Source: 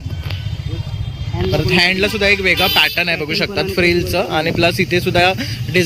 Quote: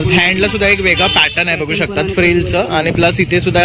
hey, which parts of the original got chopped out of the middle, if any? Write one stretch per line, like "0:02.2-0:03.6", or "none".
none